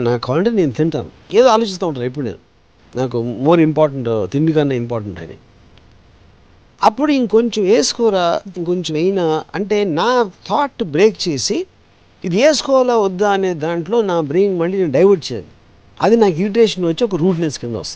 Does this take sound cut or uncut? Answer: cut